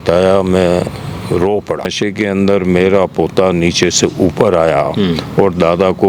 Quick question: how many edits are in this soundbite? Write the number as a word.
one